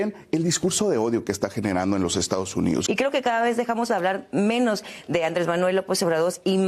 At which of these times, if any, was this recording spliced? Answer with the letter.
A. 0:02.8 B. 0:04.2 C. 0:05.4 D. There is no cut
A